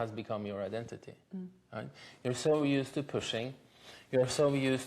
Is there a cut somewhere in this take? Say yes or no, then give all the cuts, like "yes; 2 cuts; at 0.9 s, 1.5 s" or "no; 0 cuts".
no; 0 cuts